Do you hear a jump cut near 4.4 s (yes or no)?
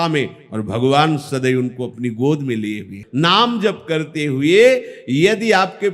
no